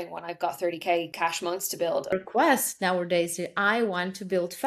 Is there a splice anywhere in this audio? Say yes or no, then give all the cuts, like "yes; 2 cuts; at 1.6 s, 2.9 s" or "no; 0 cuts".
yes; 2 cuts; at 1.1 s, 2.1 s